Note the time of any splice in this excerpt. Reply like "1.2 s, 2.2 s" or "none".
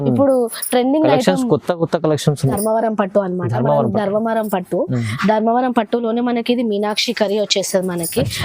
2.6 s

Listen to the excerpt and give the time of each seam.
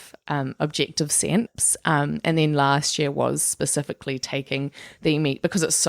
1.6 s

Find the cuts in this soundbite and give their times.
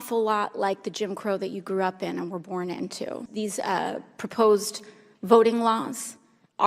3.2 s

